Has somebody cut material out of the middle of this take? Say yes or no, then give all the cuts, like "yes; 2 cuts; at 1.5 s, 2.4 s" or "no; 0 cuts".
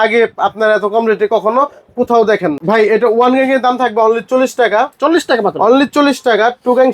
yes; 1 cut; at 2.6 s